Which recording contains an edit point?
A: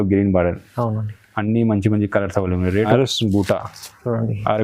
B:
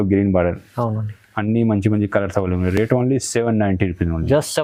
A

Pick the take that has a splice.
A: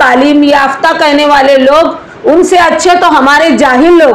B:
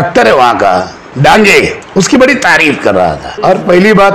B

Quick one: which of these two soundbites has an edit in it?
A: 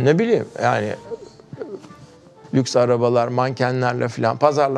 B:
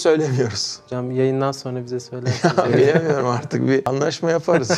A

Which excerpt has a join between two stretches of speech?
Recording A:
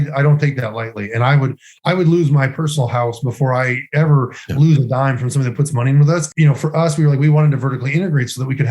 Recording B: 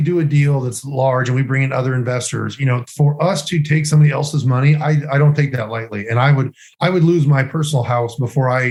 A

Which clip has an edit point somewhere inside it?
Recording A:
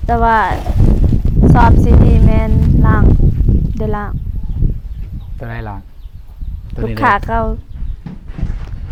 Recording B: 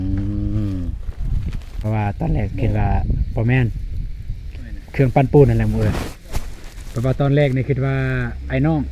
B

